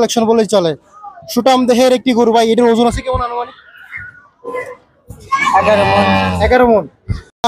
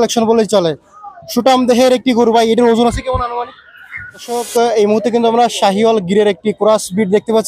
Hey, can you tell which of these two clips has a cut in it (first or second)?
second